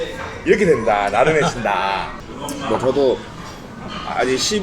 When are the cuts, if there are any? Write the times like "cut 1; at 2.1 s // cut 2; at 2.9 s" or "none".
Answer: cut 1; at 2.1 s